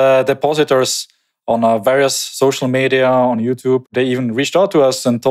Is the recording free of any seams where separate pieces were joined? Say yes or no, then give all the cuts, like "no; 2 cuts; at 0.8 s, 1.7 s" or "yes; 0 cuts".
no; 1 cut; at 3.9 s